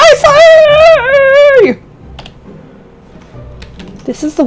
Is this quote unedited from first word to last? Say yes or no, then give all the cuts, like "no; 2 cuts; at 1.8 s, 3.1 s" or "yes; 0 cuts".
yes; 0 cuts